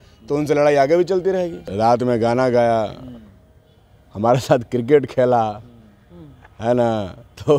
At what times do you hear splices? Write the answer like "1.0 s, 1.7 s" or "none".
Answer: 1.7 s

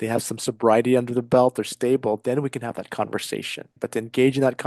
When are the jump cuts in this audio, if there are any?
3.6 s

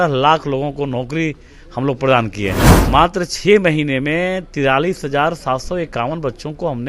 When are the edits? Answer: 2.7 s

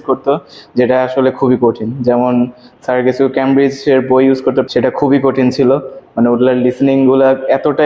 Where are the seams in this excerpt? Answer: none

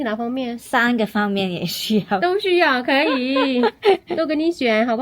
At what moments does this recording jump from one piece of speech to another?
none

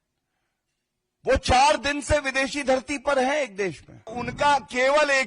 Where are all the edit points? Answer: 4.2 s

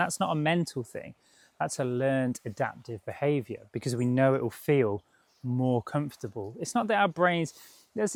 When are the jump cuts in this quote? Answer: none

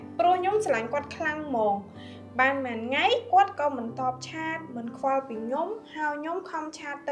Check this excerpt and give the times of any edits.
none

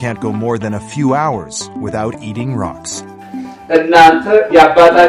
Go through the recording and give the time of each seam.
3.3 s

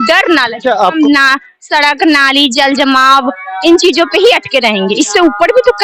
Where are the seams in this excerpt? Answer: 0.9 s

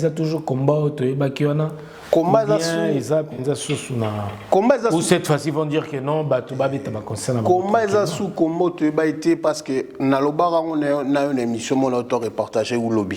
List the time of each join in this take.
none

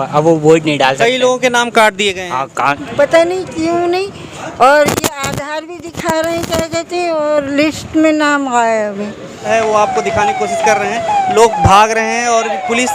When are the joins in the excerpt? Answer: 2.8 s, 9.5 s

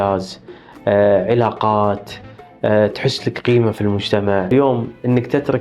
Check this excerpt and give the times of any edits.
4.5 s

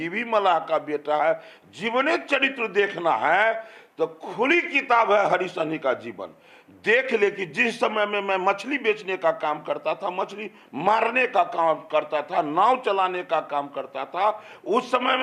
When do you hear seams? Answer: none

